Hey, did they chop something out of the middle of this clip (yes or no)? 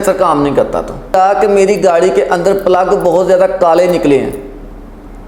yes